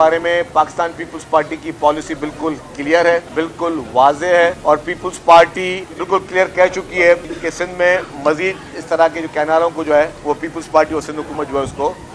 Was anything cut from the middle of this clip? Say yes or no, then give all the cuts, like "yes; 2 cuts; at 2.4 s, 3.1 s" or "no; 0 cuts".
yes; 5 cuts; at 3.3 s, 4.6 s, 5.9 s, 7.3 s, 10.2 s